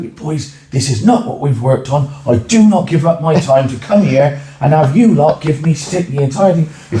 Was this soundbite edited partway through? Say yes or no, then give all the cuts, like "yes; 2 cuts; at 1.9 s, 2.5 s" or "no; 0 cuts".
no; 0 cuts